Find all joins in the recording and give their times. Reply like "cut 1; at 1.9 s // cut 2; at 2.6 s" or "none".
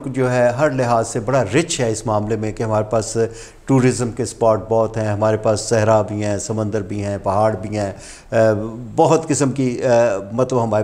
none